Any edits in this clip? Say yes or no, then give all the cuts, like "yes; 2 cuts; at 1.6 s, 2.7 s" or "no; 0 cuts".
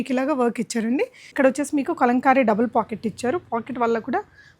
yes; 1 cut; at 1.3 s